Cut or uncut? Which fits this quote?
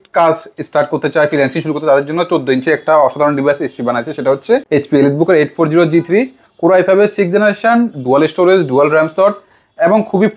cut